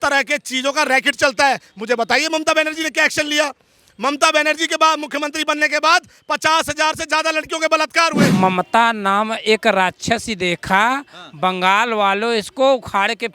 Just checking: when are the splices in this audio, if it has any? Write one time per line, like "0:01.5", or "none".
0:08.3